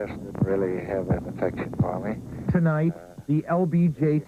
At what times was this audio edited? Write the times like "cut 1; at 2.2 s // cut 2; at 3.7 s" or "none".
cut 1; at 1.5 s

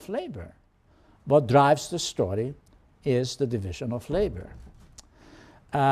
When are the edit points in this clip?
cut 1; at 3.5 s

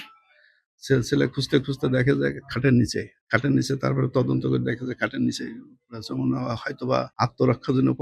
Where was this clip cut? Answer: cut 1; at 3.1 s // cut 2; at 7.1 s

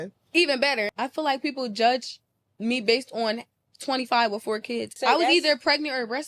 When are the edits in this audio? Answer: cut 1; at 0.9 s // cut 2; at 4.9 s

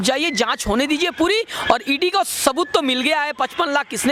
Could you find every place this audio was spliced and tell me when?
none

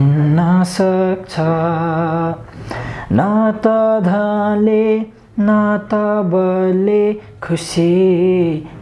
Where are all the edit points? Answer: none

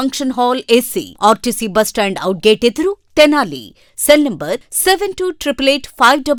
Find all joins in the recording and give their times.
none

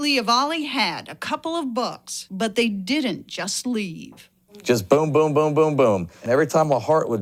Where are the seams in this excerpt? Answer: none

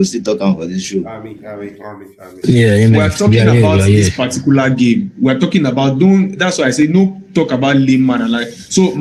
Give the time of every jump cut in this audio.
none

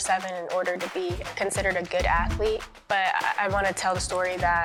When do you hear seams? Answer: none

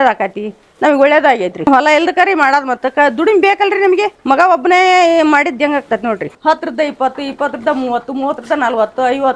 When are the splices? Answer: cut 1; at 1.6 s // cut 2; at 6.3 s

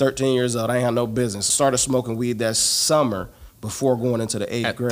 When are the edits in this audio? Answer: cut 1; at 1.4 s

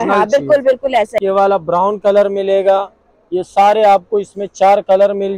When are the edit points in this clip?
cut 1; at 1.2 s

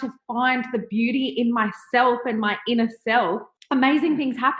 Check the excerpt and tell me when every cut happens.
cut 1; at 3.5 s

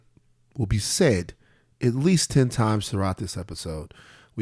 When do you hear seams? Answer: none

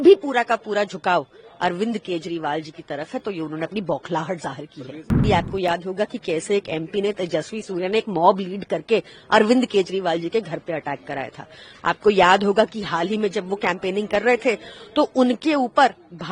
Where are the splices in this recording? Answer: cut 1; at 5.2 s

